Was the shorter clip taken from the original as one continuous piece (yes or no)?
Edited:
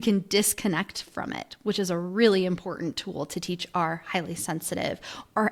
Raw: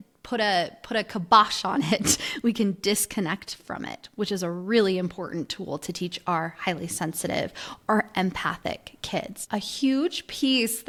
yes